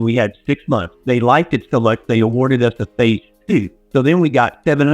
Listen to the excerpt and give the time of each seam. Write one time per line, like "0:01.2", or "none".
0:00.9